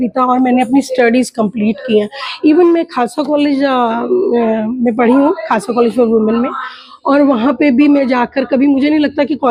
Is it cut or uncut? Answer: uncut